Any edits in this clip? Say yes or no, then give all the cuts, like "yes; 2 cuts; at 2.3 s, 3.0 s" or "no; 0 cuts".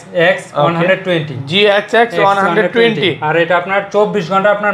no; 0 cuts